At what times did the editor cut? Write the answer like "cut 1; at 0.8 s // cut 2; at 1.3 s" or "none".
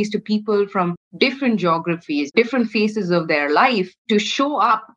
cut 1; at 1.0 s // cut 2; at 2.3 s // cut 3; at 4.0 s